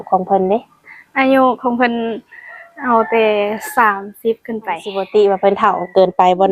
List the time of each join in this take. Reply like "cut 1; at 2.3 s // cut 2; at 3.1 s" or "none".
cut 1; at 5.0 s